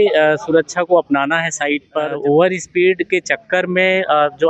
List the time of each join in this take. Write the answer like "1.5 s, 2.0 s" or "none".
2.1 s